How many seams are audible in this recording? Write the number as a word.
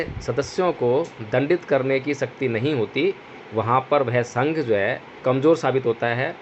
one